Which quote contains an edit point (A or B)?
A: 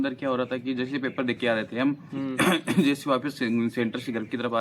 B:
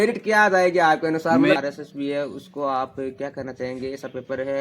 B